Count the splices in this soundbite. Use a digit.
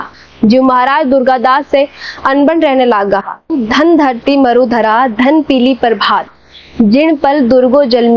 1